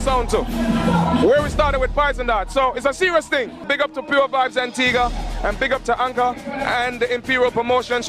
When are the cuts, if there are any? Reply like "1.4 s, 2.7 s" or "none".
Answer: none